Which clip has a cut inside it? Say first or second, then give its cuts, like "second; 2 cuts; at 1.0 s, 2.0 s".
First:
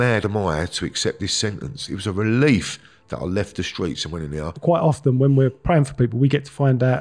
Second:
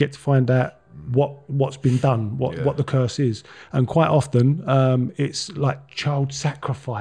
first; 1 cut; at 4.5 s